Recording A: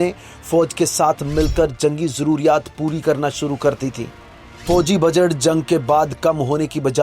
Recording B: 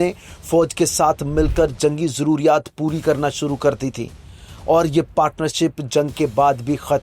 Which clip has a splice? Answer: A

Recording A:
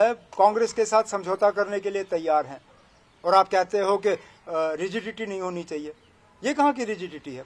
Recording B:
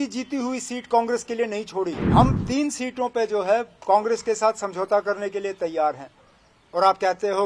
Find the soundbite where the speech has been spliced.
B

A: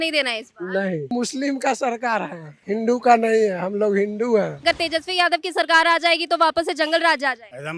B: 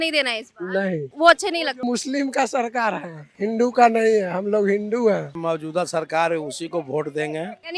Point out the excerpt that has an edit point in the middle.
A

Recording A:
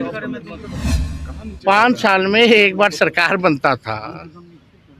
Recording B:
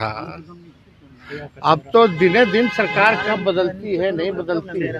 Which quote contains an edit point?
A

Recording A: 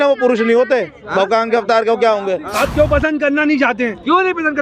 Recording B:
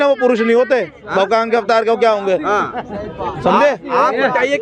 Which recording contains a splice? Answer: A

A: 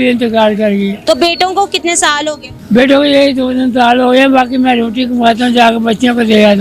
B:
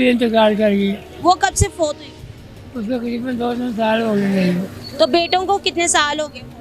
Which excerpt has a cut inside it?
A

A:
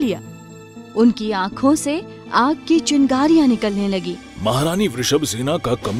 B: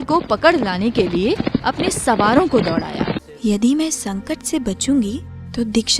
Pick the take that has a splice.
B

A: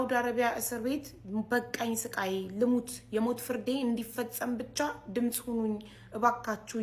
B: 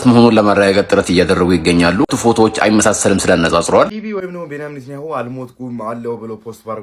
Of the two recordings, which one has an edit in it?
B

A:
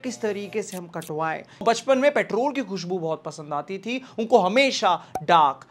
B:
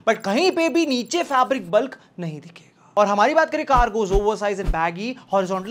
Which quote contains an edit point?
A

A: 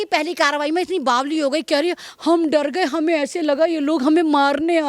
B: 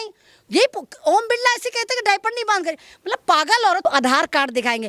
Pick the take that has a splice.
B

